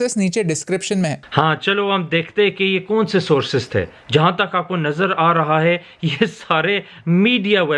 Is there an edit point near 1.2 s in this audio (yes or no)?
yes